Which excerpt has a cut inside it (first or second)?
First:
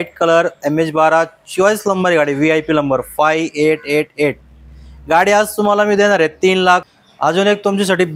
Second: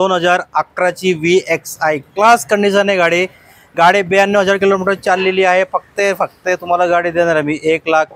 first